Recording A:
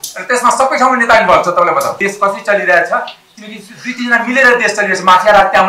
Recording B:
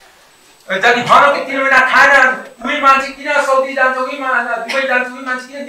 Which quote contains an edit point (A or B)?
A